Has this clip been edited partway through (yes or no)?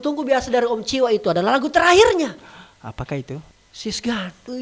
yes